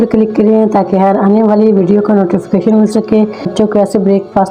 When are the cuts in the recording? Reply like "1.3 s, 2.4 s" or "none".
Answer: 3.5 s